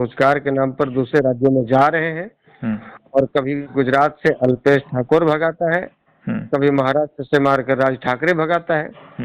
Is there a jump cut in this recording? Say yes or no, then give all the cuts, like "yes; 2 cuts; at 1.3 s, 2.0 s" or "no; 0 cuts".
no; 0 cuts